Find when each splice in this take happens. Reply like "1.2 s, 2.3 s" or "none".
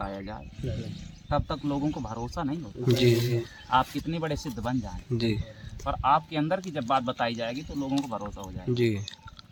none